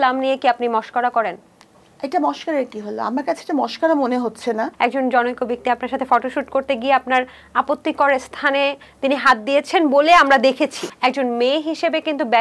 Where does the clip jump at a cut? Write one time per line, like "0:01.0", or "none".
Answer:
0:04.7
0:10.8